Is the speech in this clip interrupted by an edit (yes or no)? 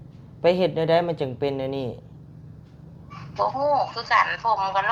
no